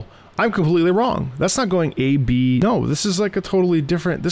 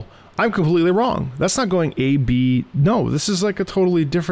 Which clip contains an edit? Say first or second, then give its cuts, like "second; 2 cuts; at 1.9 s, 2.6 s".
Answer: first; 1 cut; at 2.6 s